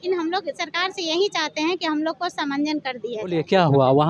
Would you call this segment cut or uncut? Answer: uncut